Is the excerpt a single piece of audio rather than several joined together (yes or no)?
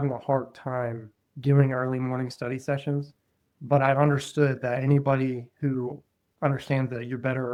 yes